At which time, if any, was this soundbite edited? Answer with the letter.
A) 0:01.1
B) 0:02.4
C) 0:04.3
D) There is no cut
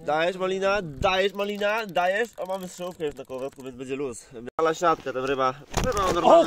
C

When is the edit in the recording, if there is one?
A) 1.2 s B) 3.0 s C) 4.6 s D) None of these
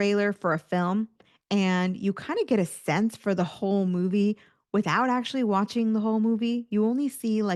D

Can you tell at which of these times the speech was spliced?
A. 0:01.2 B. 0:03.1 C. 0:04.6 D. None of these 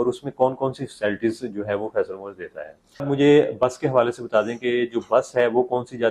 B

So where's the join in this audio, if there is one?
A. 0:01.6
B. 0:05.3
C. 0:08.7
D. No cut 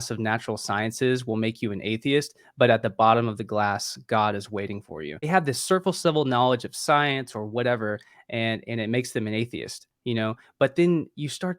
B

